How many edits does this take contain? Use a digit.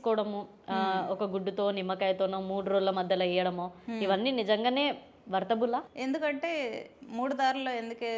1